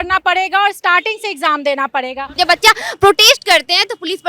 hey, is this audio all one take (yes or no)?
no